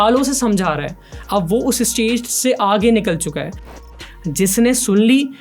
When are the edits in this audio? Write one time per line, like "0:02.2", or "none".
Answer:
0:03.7